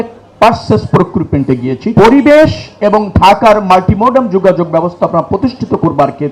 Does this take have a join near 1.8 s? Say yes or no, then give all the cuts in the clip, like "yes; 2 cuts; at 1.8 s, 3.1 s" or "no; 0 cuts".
yes; 1 cut; at 1.8 s